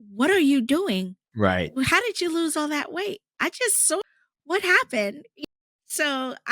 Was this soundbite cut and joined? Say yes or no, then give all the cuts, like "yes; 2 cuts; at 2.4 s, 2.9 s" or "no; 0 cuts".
yes; 2 cuts; at 4.0 s, 5.3 s